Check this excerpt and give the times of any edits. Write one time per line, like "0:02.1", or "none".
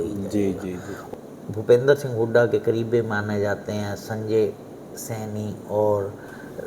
0:01.0